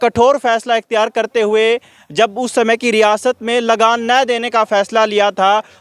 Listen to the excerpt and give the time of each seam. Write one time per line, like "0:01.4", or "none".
none